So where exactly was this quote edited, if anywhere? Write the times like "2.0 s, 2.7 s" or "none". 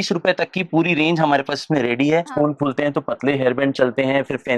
2.3 s